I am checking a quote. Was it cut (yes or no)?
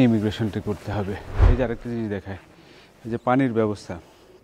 yes